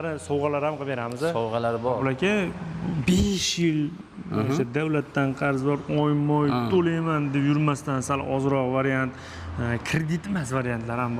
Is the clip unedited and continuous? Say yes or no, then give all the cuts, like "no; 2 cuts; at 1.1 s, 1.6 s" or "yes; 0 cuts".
no; 1 cut; at 2.0 s